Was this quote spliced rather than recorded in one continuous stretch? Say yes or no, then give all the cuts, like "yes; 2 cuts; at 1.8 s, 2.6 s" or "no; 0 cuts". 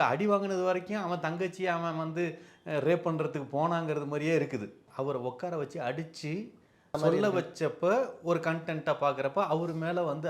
yes; 2 cuts; at 4.8 s, 7.0 s